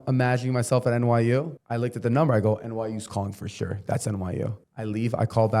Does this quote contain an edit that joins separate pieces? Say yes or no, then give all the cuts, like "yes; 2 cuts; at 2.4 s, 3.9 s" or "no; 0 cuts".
yes; 2 cuts; at 1.6 s, 4.7 s